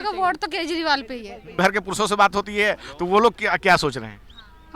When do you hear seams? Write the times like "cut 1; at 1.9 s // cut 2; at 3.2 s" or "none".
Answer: cut 1; at 1.6 s